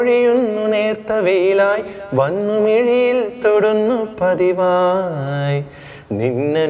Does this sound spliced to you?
no; 0 cuts

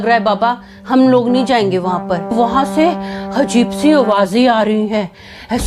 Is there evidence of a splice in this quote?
yes; 1 cut; at 2.3 s

